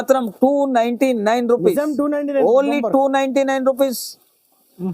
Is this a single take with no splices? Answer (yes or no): yes